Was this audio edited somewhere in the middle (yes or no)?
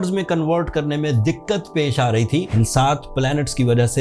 yes